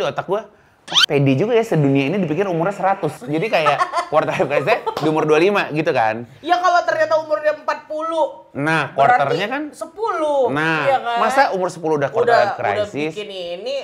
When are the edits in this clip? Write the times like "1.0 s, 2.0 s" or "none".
none